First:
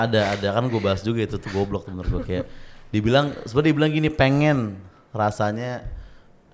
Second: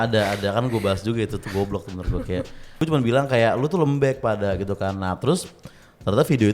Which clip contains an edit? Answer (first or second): second